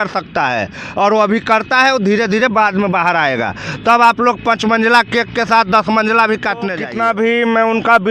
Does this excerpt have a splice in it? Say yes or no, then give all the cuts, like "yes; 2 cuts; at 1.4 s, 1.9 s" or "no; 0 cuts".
yes; 1 cut; at 6.8 s